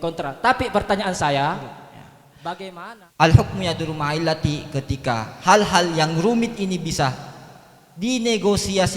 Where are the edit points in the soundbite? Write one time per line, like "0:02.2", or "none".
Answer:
0:02.8